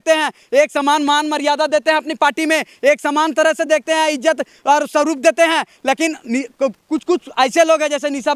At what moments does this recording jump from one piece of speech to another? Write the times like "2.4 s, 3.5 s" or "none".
none